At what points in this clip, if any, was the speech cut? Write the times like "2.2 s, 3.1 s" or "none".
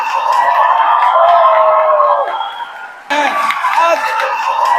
3.1 s